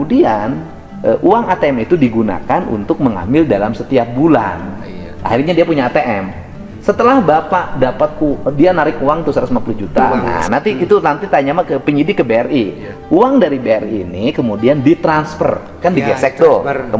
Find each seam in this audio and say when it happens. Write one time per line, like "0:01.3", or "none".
0:10.1